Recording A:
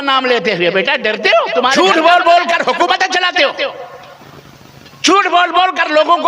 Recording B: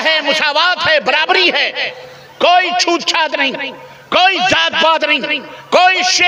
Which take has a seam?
A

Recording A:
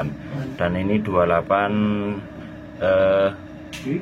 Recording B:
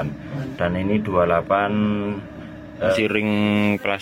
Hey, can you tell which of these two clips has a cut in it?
B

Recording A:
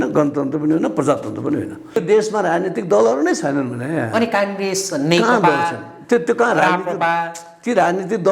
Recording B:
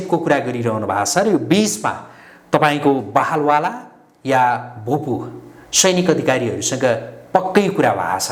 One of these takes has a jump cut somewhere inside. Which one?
A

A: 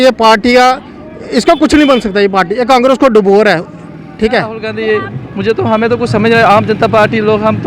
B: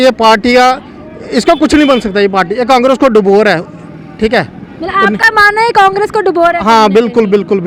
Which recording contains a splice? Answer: A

